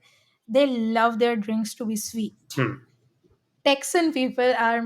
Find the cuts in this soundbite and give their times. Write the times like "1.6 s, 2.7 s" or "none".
3.4 s